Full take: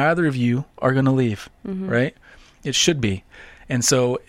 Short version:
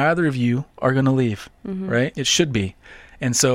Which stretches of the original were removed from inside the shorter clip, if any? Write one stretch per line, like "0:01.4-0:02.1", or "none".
0:02.2-0:02.7